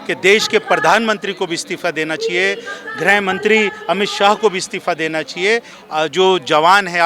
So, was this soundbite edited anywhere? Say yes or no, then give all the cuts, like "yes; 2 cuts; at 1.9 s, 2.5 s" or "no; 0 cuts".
yes; 1 cut; at 5.8 s